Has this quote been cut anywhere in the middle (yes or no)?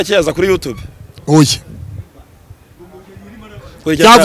no